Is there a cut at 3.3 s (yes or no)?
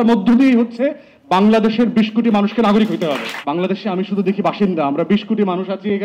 yes